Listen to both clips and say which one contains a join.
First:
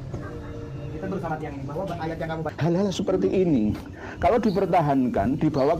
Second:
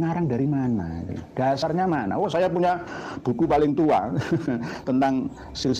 first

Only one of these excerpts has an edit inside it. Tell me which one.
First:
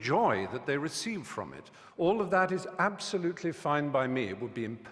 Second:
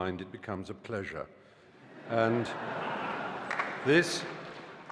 second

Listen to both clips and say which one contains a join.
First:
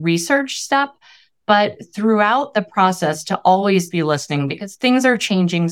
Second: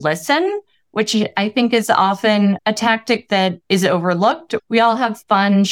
second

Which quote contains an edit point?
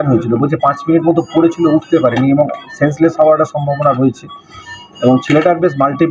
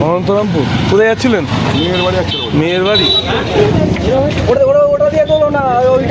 second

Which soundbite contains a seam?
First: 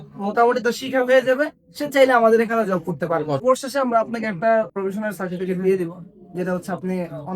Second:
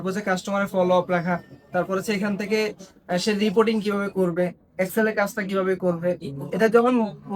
first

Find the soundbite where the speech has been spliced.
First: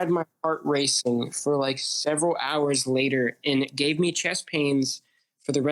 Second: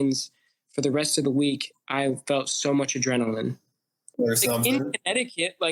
second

